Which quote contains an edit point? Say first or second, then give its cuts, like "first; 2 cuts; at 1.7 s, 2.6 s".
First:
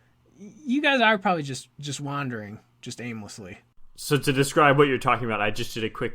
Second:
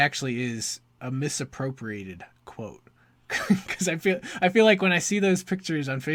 first; 1 cut; at 4.0 s